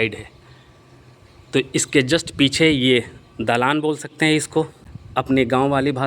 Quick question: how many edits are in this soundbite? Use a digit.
1